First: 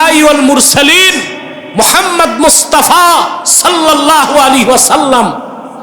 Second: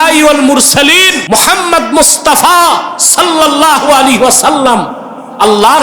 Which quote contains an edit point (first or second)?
second